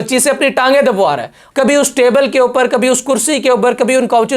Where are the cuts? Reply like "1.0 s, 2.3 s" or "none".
1.4 s